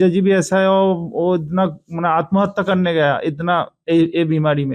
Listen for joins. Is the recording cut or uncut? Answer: uncut